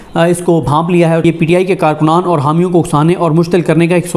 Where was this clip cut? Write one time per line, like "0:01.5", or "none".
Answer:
0:01.2